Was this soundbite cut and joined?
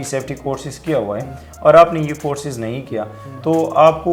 no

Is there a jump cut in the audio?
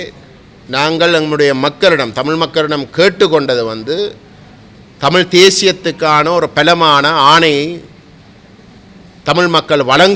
no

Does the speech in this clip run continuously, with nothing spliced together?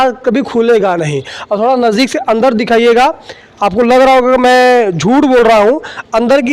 yes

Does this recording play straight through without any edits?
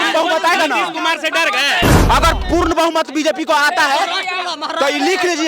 no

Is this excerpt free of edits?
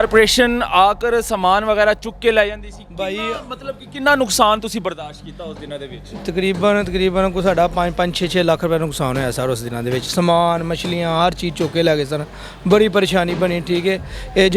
yes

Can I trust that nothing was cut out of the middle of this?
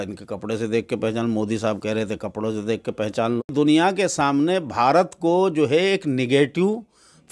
no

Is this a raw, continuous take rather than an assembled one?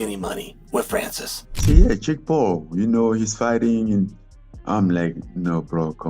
no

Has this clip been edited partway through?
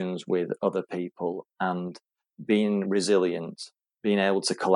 no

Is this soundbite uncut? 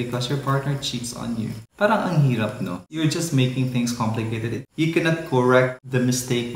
yes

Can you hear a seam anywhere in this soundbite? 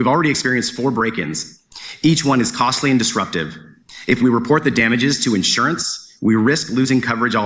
no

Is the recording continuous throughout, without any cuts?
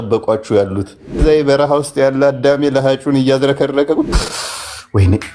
no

